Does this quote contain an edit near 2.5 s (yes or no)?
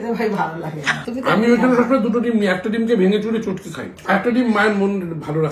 no